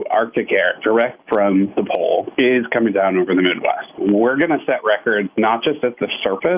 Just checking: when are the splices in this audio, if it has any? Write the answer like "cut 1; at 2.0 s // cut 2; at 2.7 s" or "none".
none